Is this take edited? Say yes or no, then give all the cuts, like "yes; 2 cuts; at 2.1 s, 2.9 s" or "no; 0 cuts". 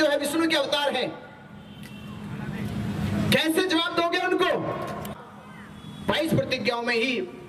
yes; 1 cut; at 5.2 s